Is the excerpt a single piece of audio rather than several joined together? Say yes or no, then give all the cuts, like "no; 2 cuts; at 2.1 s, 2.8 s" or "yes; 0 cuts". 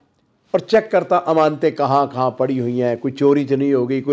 yes; 0 cuts